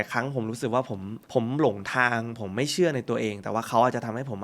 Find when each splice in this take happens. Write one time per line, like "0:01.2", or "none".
0:01.2